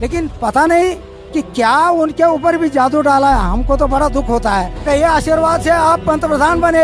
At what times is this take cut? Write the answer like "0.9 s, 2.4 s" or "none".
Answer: 4.8 s